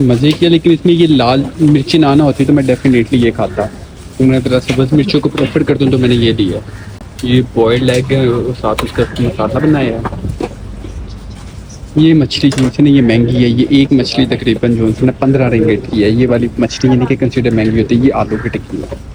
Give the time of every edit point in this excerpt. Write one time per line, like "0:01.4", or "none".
none